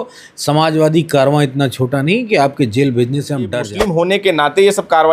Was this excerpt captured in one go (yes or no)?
no